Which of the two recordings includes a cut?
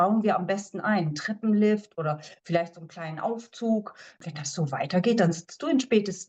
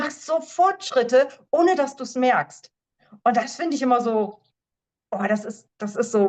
first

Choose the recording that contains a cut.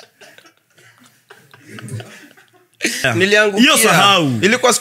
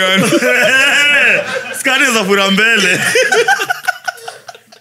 first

